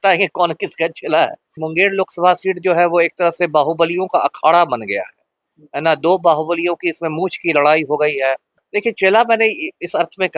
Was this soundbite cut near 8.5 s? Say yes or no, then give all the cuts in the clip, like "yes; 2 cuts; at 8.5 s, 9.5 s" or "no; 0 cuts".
yes; 2 cuts; at 1.6 s, 8.5 s